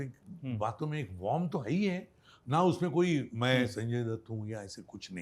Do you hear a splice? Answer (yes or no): yes